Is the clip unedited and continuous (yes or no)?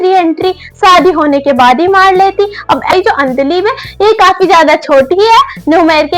no